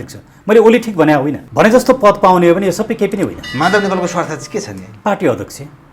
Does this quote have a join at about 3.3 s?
no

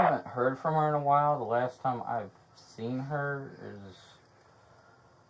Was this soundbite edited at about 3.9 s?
no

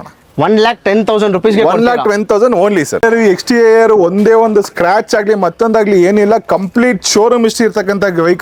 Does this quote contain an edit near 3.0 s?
yes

